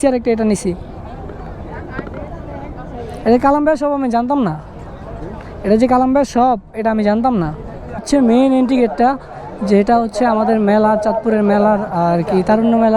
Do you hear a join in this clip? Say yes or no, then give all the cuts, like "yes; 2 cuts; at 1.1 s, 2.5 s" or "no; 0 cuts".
yes; 1 cut; at 8.0 s